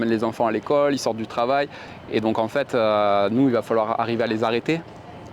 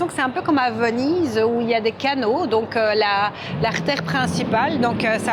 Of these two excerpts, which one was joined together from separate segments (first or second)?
first